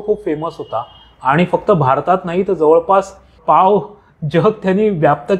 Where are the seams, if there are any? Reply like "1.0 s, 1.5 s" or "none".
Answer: 3.4 s